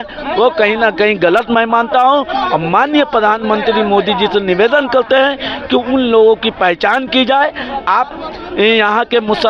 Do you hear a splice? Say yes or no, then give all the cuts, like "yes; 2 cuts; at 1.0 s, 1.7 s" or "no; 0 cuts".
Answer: no; 0 cuts